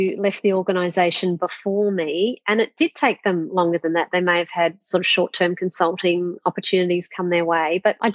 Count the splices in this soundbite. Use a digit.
0